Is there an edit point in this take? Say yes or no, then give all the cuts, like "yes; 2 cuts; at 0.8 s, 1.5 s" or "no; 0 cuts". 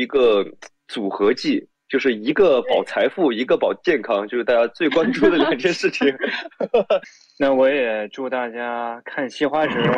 yes; 1 cut; at 7.1 s